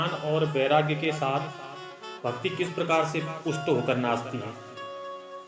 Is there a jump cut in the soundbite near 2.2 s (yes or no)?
no